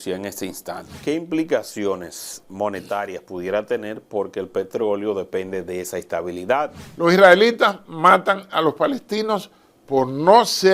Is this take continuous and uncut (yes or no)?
no